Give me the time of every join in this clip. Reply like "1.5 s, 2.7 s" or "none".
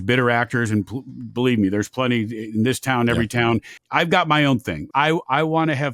3.8 s, 4.8 s